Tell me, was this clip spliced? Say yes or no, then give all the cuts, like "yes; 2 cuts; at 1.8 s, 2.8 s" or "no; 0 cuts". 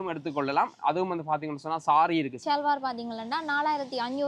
yes; 1 cut; at 2.3 s